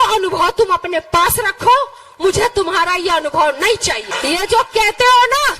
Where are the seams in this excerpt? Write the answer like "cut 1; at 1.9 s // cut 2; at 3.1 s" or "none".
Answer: cut 1; at 4.1 s